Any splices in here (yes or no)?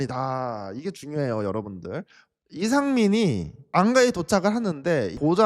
yes